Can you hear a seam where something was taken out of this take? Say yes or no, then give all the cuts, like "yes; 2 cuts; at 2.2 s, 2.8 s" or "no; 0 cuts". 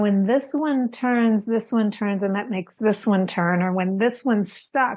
no; 0 cuts